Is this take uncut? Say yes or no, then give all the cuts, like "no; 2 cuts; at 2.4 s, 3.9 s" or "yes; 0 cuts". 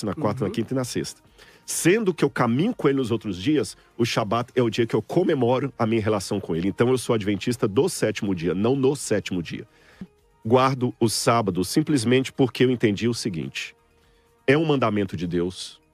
no; 1 cut; at 10.1 s